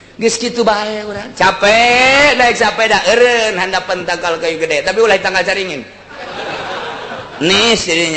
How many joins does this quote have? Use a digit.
0